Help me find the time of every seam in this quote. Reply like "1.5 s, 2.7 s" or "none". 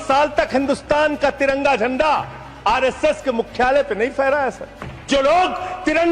5.0 s